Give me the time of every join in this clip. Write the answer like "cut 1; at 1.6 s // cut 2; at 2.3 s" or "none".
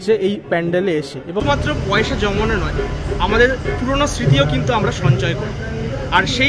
cut 1; at 1.4 s